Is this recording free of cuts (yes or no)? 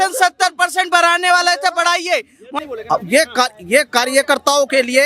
no